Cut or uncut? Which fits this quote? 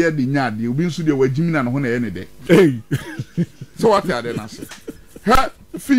uncut